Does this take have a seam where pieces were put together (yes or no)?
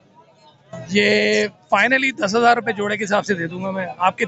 no